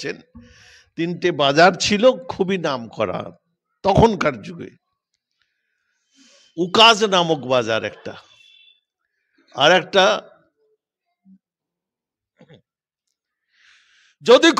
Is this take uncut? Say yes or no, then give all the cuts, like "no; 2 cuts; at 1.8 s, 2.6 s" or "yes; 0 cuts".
no; 1 cut; at 11.5 s